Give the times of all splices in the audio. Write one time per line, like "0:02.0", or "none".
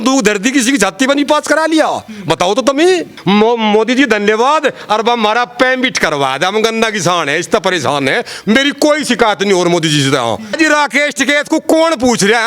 0:03.1
0:10.5